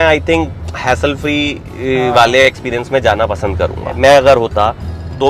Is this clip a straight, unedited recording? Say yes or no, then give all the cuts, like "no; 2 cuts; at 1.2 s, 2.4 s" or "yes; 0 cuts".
no; 1 cut; at 3.9 s